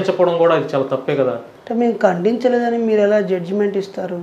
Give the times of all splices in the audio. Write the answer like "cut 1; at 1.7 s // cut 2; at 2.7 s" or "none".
cut 1; at 1.5 s